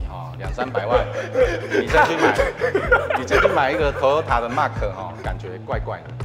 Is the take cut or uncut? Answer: uncut